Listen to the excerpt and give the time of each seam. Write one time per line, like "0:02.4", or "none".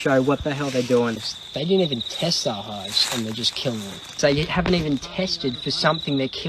0:01.2
0:04.2